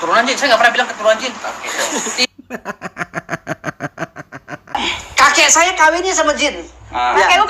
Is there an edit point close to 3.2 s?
no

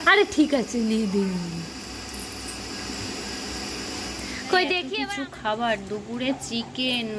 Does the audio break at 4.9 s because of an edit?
yes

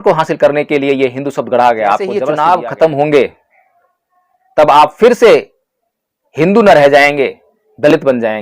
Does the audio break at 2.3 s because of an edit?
yes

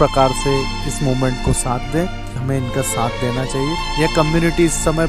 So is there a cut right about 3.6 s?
no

